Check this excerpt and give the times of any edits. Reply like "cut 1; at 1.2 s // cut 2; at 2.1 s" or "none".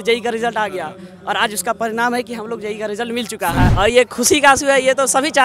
cut 1; at 3.7 s

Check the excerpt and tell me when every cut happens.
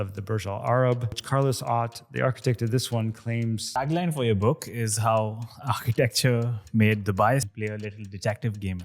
cut 1; at 1.2 s // cut 2; at 3.8 s // cut 3; at 7.5 s

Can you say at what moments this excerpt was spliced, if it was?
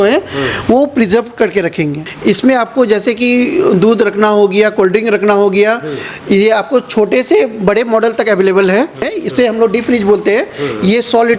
cut 1; at 2.0 s // cut 2; at 9.1 s

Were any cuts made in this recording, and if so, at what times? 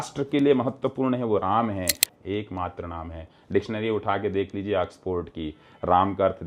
cut 1; at 2.0 s

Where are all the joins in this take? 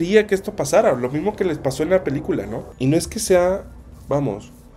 cut 1; at 2.6 s

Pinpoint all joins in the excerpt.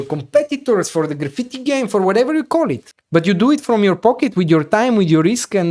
cut 1; at 2.9 s

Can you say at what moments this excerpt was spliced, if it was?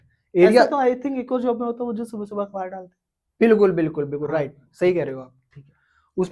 none

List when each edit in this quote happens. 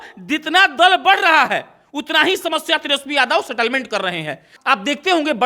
cut 1; at 4.5 s

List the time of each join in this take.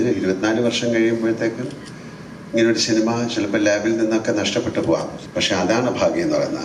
cut 1; at 5.2 s

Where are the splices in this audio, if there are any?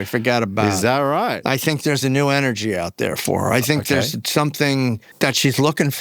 cut 1; at 1.4 s // cut 2; at 5.1 s

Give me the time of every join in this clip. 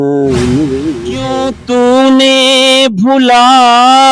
cut 1; at 1.4 s

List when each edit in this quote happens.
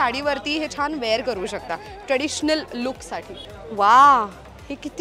none

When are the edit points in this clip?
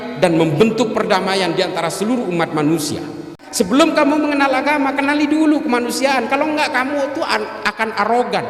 cut 1; at 3.4 s

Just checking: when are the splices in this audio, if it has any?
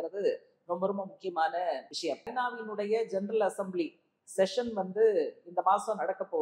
cut 1; at 2.3 s

